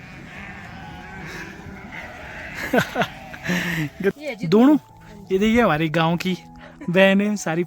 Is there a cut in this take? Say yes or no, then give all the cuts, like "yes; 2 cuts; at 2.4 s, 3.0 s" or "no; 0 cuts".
yes; 1 cut; at 4.2 s